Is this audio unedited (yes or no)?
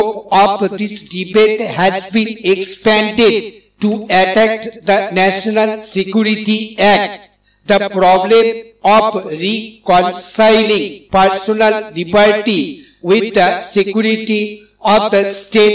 yes